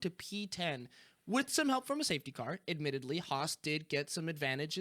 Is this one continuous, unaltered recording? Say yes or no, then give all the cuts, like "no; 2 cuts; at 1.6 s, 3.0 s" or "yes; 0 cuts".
yes; 0 cuts